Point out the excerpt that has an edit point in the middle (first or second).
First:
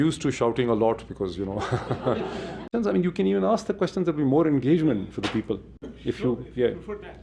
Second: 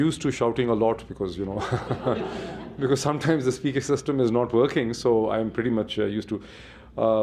first